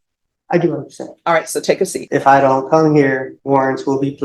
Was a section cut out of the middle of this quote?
yes; 2 cuts; at 2.0 s, 3.3 s

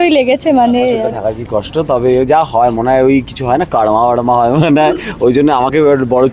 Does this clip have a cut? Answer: yes; 1 cut; at 1.2 s

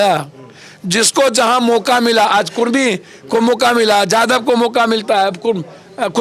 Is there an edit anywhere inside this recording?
no; 0 cuts

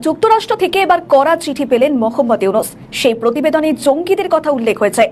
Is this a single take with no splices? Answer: yes; 0 cuts

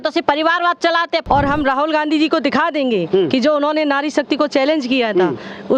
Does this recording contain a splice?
yes; 1 cut; at 1.2 s

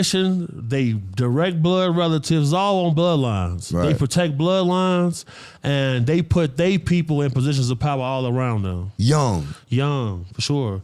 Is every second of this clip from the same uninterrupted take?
yes; 0 cuts

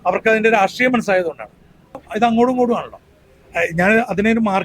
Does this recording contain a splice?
yes; 1 cut; at 2.0 s

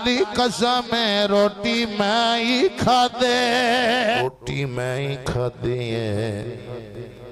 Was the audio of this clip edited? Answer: yes; 1 cut; at 4.2 s

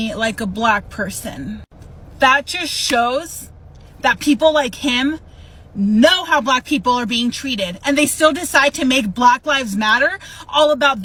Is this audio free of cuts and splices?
yes; 0 cuts

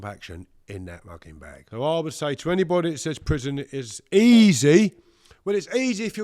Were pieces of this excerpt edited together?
yes; 1 cut; at 1.5 s

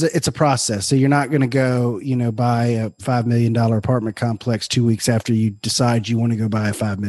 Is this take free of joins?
yes; 0 cuts

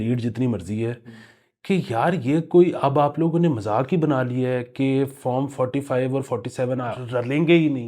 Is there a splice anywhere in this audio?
yes; 1 cut; at 7.0 s

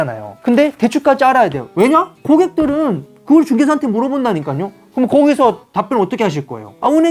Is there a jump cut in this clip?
yes; 1 cut; at 4.8 s

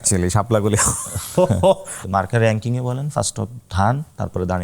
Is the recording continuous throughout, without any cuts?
no; 1 cut; at 1.9 s

